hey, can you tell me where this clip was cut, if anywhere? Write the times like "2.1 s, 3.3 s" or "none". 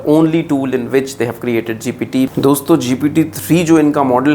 2.3 s